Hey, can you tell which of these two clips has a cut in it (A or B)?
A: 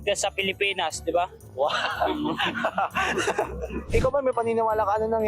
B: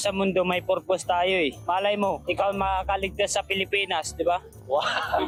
A